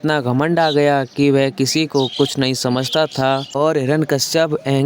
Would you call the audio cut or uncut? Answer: uncut